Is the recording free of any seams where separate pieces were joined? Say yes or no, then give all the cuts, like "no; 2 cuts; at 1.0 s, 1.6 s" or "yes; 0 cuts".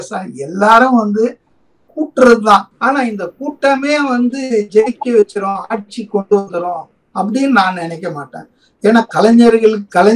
no; 1 cut; at 2.7 s